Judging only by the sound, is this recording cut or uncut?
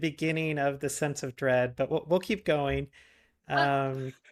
uncut